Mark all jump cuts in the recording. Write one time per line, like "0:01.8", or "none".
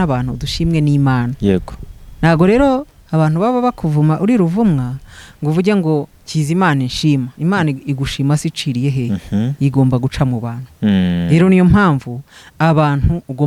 none